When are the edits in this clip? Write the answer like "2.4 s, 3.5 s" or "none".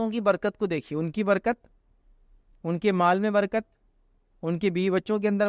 none